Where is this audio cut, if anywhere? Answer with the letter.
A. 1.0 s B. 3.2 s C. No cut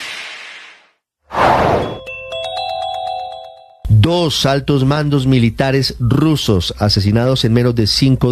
B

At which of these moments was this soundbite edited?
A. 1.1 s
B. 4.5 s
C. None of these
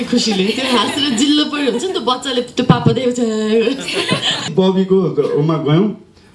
B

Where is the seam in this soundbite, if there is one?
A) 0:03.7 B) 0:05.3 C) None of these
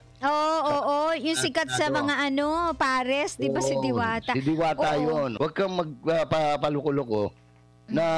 B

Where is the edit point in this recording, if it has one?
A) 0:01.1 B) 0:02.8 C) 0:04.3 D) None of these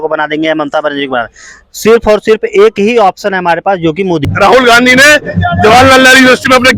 C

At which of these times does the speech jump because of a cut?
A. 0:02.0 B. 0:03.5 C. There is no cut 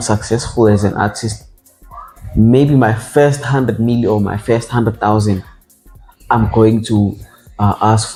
C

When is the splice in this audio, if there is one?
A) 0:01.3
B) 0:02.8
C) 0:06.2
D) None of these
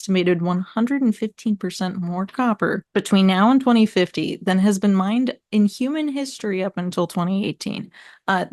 B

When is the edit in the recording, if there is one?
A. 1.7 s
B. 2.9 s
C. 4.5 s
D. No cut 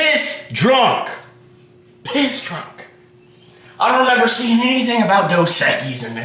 D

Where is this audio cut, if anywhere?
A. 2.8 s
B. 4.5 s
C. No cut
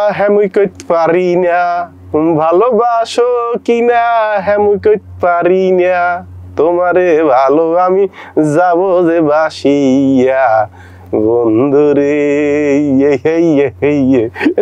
C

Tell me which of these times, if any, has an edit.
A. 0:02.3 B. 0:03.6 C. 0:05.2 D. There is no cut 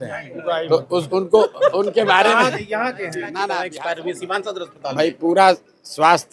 B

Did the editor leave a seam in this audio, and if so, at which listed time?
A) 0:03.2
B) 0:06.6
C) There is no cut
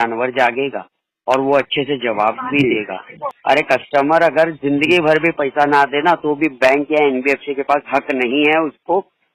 A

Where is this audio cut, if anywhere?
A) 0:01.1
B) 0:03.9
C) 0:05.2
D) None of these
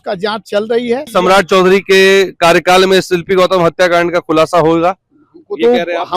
A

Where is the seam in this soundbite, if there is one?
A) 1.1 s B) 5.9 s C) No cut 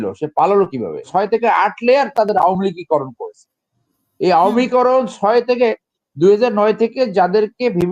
A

